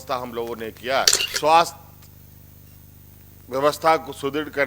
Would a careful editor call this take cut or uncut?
cut